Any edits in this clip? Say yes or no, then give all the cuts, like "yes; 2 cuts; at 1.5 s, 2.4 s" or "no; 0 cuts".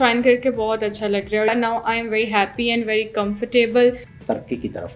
yes; 2 cuts; at 1.5 s, 4.1 s